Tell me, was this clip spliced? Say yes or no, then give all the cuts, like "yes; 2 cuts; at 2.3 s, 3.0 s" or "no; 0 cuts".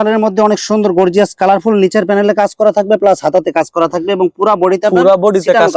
no; 0 cuts